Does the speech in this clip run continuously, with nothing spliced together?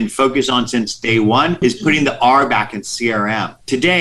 no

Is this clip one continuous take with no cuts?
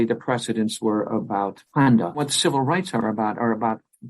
no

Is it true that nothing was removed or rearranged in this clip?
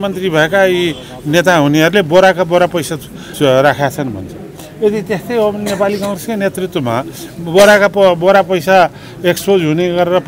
no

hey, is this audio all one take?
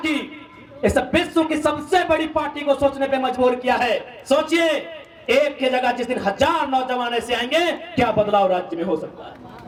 yes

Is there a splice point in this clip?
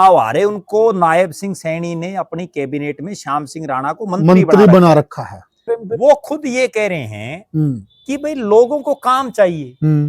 yes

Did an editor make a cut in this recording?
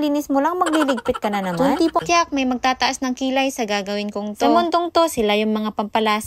yes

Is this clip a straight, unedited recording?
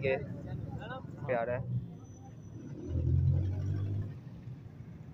no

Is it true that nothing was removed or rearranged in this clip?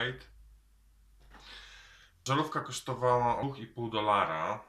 no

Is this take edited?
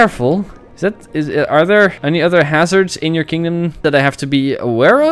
yes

